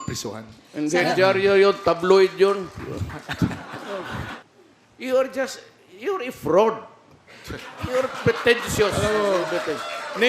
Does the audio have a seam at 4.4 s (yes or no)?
yes